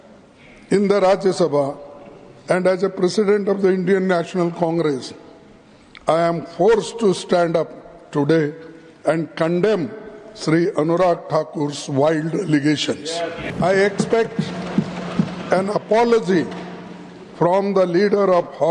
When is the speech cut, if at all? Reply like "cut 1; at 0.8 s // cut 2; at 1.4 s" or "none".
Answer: cut 1; at 13.5 s